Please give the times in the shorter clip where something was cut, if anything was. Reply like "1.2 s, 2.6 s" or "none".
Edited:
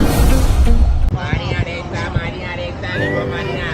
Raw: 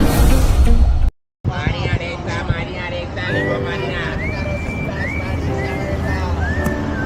1.0 s

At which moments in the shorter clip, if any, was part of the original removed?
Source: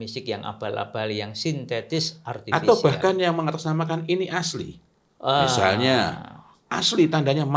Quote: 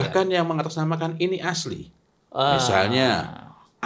none

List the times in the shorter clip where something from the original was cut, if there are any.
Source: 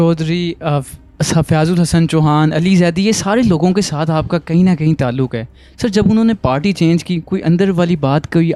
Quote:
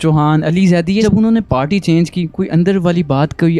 1.0 s

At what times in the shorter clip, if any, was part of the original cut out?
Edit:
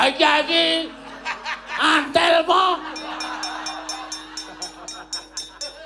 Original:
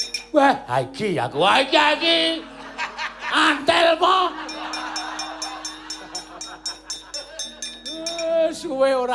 none

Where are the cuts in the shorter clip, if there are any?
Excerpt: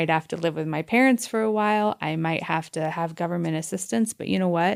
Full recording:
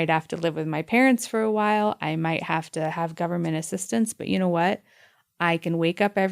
none

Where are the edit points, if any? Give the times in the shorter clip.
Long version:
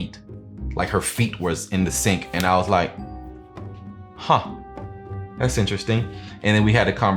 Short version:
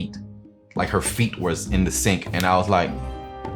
none

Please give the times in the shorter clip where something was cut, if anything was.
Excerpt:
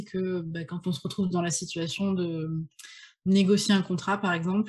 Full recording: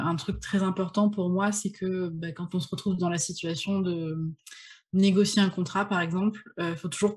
none

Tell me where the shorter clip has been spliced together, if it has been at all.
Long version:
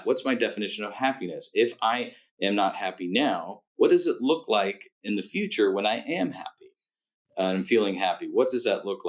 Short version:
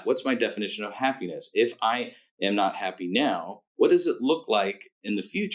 none

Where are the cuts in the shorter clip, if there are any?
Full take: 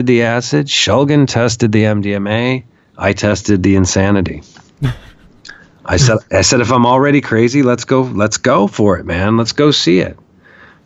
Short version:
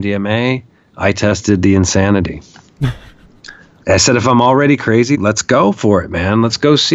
3.8 s, 5.2 s

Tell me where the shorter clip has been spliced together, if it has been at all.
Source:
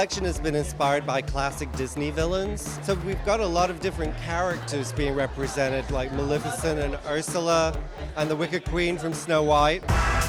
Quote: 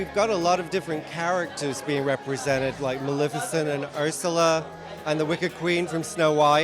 none

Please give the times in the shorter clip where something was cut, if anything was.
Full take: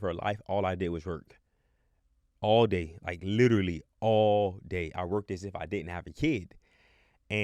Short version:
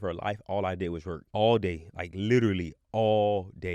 1.2 s

